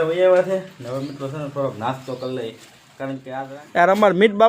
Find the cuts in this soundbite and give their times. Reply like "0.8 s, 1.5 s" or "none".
3.2 s